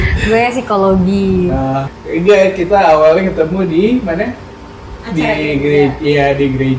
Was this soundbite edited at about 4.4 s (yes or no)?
no